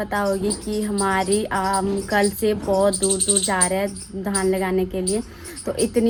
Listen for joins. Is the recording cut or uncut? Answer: uncut